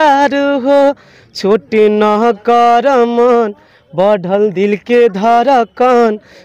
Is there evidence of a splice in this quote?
no; 0 cuts

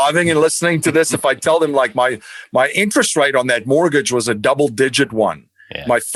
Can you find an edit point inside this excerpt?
no; 0 cuts

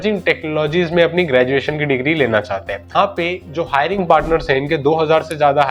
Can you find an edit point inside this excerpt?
no; 0 cuts

